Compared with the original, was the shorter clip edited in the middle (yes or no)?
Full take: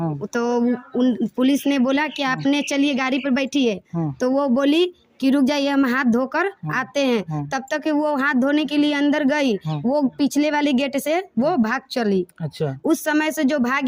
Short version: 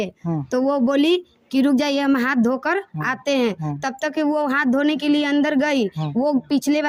no